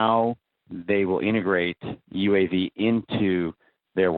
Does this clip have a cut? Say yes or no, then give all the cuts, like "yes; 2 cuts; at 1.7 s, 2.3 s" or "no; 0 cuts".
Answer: no; 0 cuts